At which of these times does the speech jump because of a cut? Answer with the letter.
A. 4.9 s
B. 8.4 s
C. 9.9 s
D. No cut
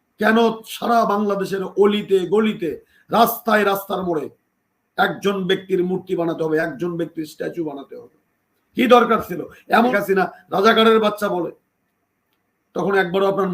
C